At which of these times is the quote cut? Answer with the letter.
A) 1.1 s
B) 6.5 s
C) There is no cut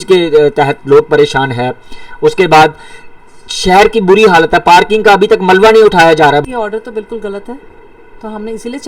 B